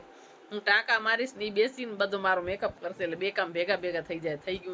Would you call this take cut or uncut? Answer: uncut